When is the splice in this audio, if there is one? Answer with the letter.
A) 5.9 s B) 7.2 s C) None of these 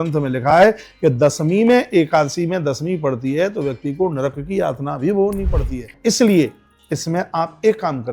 A